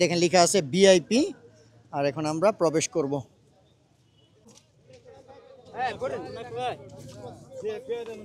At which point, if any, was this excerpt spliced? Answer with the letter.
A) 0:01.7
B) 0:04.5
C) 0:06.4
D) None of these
B